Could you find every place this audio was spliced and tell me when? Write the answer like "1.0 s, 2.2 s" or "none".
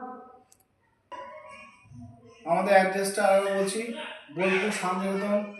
3.7 s